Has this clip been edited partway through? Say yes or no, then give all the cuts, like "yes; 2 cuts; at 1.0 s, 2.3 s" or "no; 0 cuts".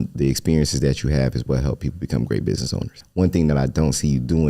yes; 1 cut; at 2.9 s